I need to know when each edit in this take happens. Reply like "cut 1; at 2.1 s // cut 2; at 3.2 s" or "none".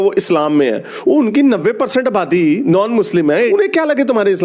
cut 1; at 3.5 s